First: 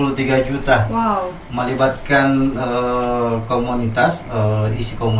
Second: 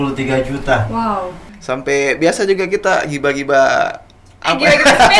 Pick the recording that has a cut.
second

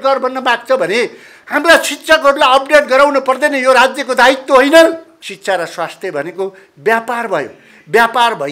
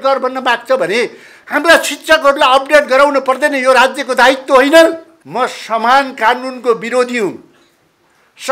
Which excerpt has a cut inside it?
first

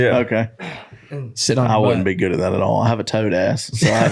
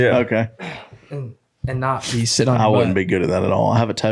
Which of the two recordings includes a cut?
first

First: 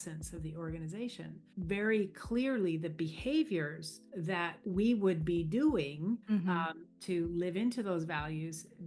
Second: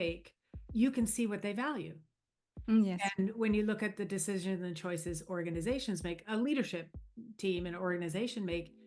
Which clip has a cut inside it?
first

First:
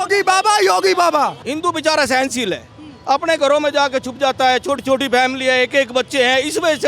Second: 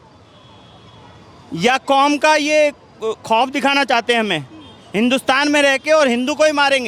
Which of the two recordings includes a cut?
first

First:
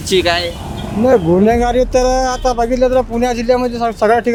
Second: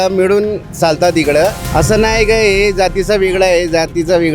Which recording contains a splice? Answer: second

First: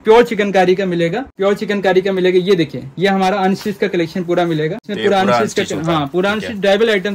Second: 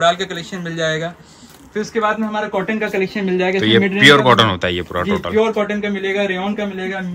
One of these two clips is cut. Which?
first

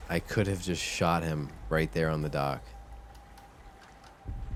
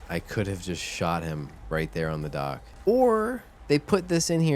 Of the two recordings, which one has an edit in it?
second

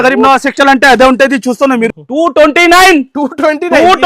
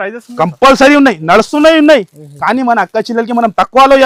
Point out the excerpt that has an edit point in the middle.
first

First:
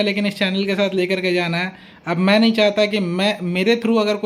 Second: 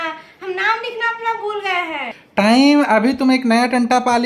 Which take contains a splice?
second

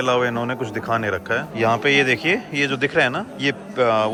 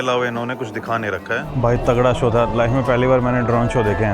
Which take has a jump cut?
second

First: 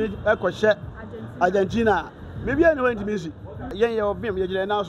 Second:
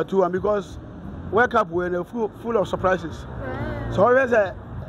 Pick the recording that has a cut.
first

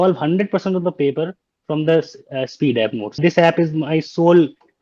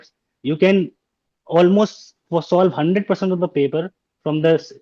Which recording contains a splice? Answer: first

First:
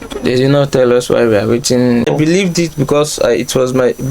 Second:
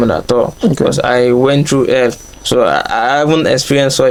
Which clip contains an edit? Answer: first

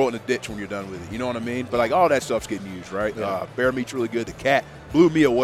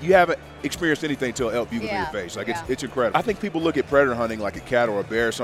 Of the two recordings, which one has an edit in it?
second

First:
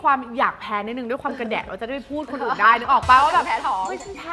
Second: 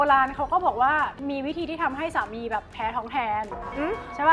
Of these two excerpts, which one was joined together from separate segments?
second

